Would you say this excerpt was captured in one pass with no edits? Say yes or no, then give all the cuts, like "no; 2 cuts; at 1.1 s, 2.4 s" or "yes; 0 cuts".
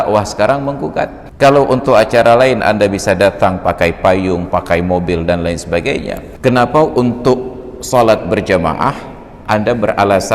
no; 2 cuts; at 1.2 s, 6.2 s